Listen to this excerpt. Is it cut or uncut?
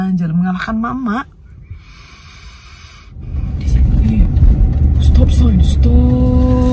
cut